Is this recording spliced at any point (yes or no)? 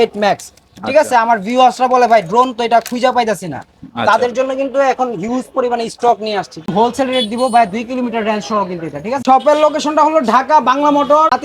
yes